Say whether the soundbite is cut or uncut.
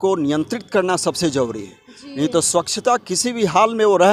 uncut